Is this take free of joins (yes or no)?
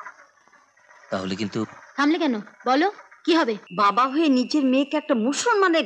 no